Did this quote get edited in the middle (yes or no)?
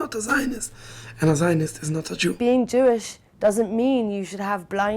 yes